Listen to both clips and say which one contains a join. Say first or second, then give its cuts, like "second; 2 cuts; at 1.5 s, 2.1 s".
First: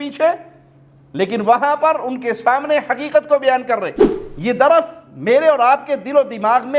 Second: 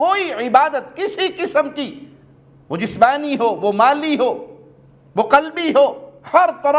first; 1 cut; at 4.0 s